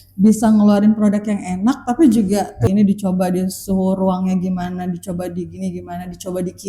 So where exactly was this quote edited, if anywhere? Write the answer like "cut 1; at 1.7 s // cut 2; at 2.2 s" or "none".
cut 1; at 2.6 s